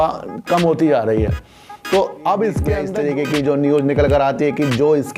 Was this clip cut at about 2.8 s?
yes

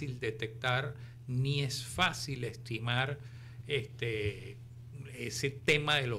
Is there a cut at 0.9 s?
no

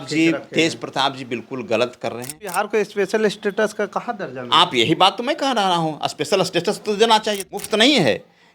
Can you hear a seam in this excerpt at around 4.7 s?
no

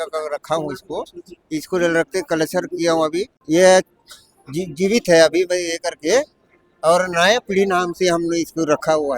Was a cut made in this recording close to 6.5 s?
no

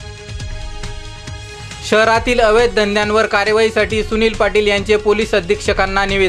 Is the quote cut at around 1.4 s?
yes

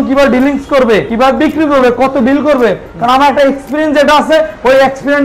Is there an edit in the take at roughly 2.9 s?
no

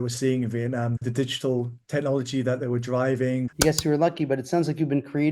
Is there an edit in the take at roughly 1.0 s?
yes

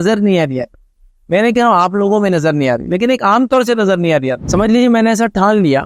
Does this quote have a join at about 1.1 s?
no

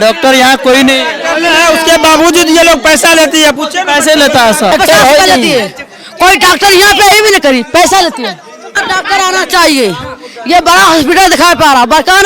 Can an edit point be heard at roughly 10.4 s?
no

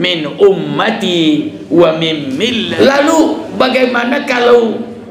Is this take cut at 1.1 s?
no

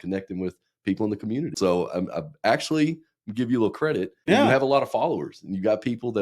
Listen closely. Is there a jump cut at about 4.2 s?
yes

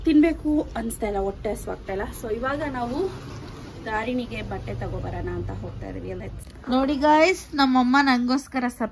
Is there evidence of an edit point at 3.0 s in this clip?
no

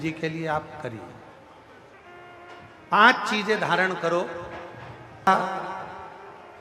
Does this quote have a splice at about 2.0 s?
yes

